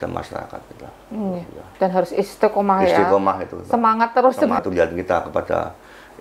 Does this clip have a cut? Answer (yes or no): yes